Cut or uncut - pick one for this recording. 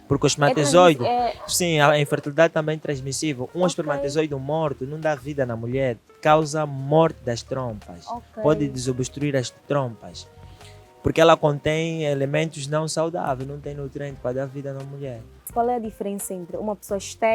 cut